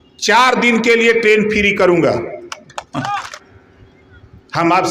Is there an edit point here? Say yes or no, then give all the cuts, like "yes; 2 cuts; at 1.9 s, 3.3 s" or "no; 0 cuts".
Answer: yes; 1 cut; at 3.4 s